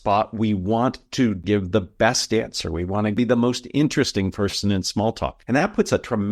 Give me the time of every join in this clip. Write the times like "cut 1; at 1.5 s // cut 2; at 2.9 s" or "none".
cut 1; at 1.4 s // cut 2; at 3.2 s // cut 3; at 5.4 s